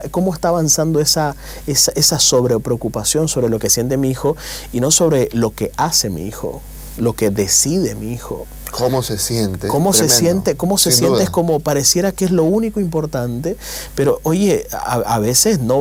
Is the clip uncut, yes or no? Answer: yes